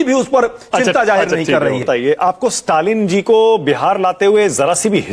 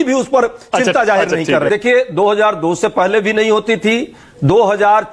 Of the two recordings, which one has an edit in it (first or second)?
second